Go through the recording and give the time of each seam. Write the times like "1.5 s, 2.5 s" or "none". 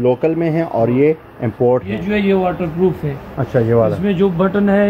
1.9 s